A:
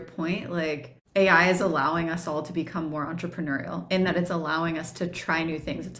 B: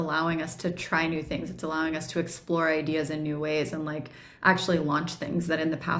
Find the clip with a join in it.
A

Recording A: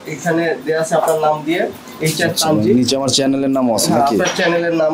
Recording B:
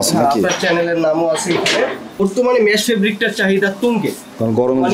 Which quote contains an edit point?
B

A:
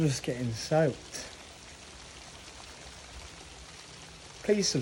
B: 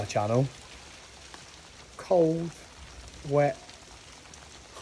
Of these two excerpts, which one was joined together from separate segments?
B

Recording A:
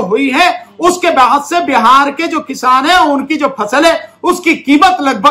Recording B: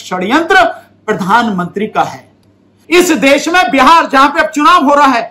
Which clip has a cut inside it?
B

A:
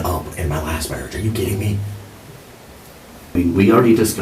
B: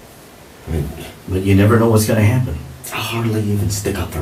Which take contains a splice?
A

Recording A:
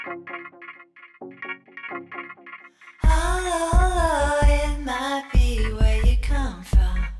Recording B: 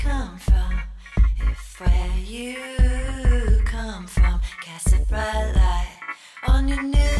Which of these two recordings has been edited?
B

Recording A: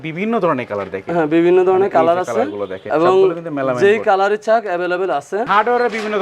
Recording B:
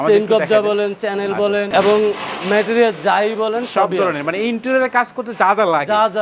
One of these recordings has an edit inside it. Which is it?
A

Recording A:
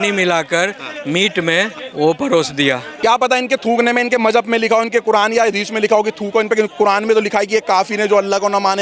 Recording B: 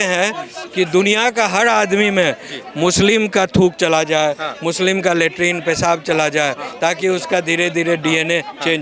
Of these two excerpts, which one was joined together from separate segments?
A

